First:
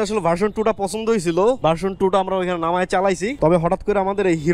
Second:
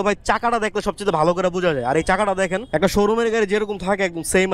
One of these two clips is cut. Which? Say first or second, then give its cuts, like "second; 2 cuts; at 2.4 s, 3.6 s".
first; 1 cut; at 1.6 s